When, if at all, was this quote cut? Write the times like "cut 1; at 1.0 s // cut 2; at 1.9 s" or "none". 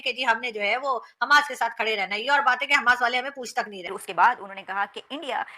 cut 1; at 3.9 s